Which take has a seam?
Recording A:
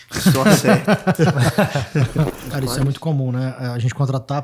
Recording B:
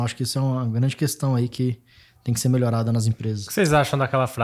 A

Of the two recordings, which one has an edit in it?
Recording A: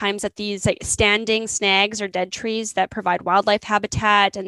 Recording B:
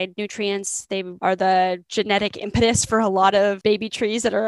B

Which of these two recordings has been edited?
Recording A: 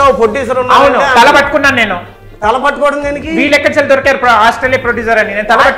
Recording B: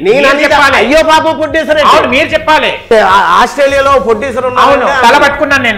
B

